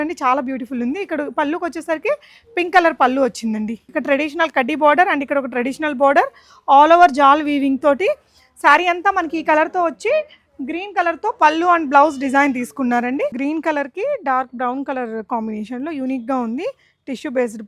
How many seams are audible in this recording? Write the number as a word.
two